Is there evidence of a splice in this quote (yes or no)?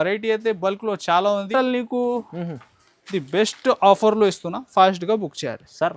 yes